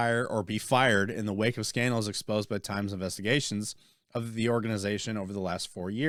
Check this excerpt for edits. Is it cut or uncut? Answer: uncut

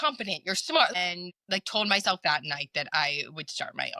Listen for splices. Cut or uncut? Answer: cut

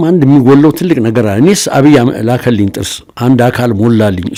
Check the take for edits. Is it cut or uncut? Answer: uncut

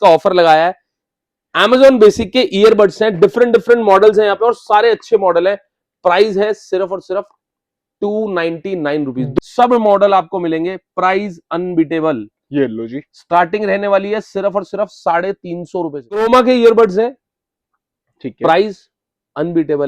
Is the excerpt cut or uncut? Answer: cut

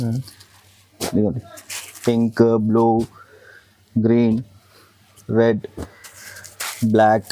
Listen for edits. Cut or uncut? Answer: uncut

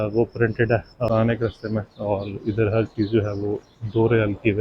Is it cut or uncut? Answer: cut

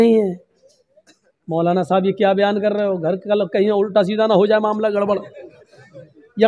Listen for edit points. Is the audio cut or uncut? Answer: uncut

